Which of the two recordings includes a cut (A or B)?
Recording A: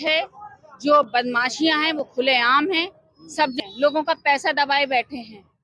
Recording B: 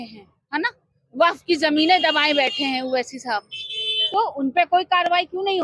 A